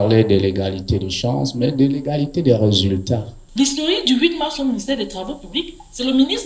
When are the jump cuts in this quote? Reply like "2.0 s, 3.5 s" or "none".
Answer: 3.4 s